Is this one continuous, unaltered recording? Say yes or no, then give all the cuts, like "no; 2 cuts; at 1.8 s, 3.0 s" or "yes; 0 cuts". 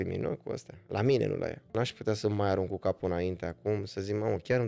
no; 1 cut; at 1.7 s